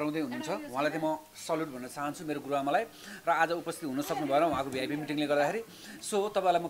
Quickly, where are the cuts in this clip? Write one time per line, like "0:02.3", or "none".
none